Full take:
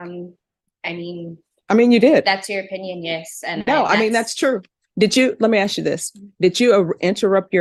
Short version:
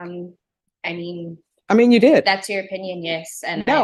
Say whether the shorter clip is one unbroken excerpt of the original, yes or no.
yes